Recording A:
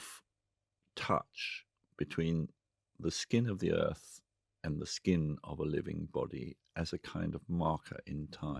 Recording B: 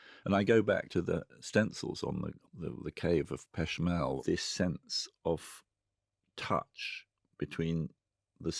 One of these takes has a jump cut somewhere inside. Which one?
B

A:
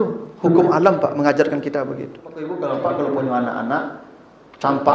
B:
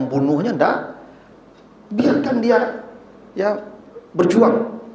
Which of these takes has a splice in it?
A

